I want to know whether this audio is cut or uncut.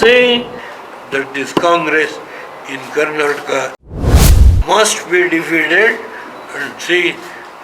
cut